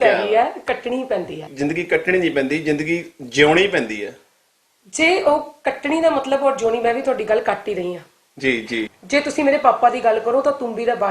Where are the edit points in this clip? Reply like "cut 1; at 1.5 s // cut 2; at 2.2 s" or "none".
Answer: cut 1; at 1.5 s // cut 2; at 9.0 s